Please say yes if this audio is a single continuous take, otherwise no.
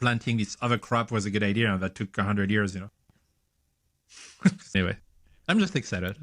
no